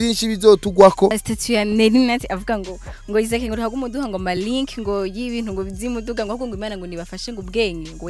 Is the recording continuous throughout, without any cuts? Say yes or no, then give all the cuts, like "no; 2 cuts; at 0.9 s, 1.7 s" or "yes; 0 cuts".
no; 1 cut; at 1.3 s